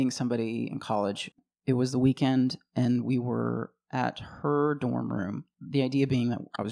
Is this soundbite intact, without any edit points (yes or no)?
no